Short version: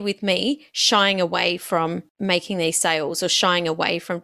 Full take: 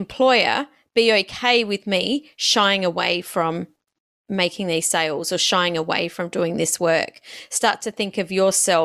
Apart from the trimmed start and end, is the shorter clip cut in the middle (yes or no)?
yes